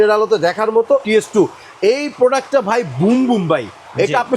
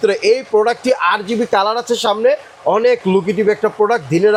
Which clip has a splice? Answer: first; 1 cut; at 1.0 s

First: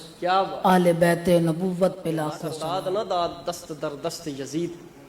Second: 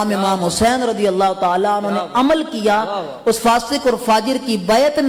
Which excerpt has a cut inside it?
first; 1 cut; at 2.4 s

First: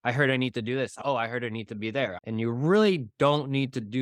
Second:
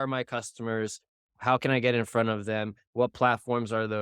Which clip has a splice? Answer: first; 2 cuts; at 0.9 s, 2.2 s

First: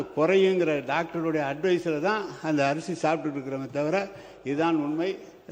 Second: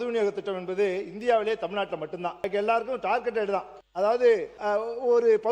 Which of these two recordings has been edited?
second; 3 cuts; at 2.4 s, 3.8 s, 4.5 s

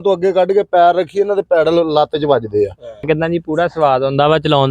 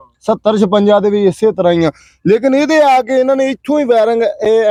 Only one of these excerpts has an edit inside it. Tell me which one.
first; 1 cut; at 3.0 s

